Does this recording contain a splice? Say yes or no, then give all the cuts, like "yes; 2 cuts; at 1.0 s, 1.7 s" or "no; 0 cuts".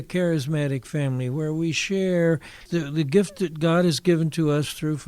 yes; 1 cut; at 2.6 s